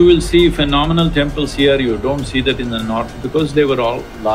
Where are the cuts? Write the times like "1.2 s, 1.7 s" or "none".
none